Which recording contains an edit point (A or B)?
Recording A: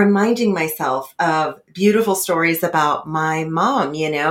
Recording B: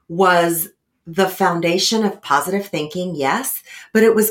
B